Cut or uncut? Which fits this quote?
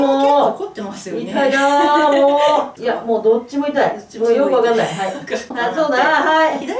cut